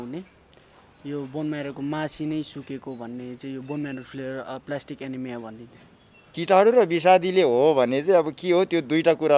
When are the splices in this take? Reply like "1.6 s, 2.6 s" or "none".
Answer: 6.4 s